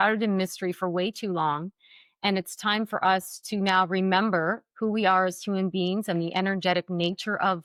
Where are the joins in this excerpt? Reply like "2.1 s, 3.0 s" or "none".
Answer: none